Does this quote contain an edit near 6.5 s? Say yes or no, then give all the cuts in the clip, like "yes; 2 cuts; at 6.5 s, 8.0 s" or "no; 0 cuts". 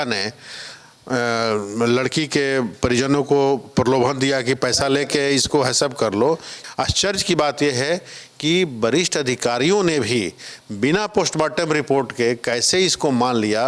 yes; 1 cut; at 6.5 s